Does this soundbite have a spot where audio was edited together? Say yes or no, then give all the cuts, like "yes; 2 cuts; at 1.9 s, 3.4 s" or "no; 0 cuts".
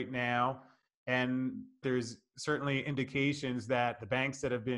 yes; 1 cut; at 1.8 s